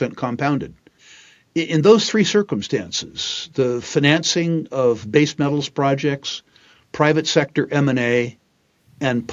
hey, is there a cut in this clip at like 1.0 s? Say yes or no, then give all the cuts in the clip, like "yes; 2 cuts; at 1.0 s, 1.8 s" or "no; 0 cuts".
yes; 1 cut; at 1.0 s